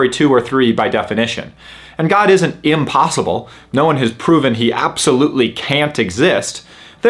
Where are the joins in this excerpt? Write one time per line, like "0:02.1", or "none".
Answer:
none